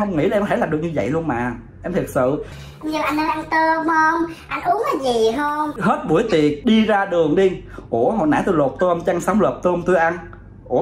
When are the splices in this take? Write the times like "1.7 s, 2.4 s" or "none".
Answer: none